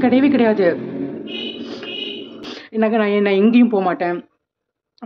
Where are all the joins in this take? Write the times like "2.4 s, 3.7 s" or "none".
2.4 s